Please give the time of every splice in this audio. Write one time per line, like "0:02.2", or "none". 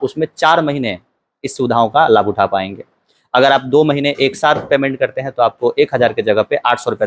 none